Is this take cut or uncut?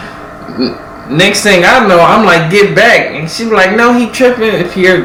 uncut